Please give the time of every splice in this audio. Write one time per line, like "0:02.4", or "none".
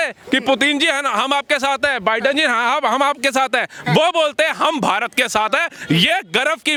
none

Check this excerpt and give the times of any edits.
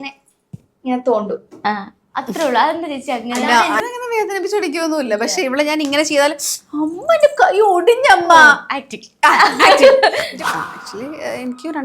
0:03.8
0:10.3

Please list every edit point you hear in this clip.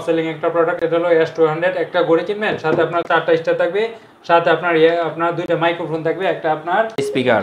none

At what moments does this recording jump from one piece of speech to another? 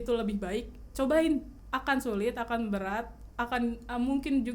0:01.6

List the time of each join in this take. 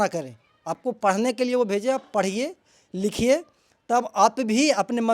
none

